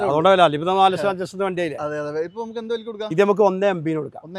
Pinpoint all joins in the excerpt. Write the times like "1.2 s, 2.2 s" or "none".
none